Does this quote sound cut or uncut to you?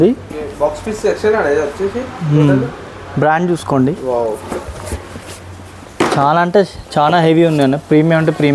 uncut